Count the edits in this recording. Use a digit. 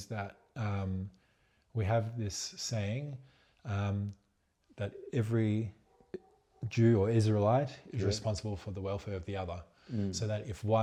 0